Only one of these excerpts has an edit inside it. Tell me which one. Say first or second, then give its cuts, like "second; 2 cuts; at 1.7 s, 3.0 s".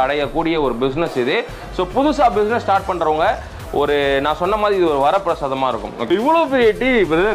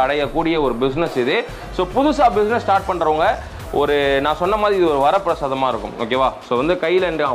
first; 1 cut; at 6.1 s